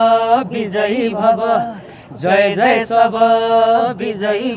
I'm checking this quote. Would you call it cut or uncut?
uncut